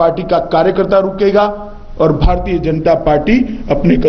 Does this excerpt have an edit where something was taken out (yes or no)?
no